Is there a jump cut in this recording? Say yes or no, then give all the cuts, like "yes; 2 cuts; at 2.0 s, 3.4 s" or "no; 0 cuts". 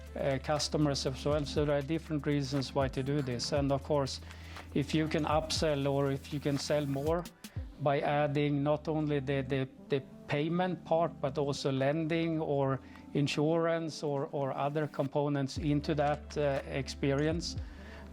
no; 0 cuts